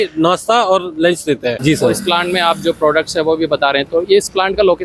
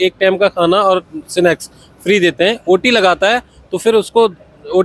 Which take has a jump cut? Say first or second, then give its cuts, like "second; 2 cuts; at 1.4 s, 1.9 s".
first; 1 cut; at 1.5 s